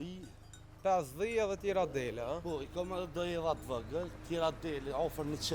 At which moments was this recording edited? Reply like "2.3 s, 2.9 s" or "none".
none